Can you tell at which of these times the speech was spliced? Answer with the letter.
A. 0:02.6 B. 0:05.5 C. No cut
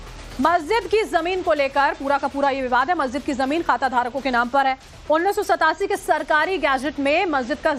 A